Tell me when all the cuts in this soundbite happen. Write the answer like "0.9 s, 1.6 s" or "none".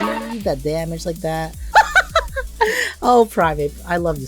1.6 s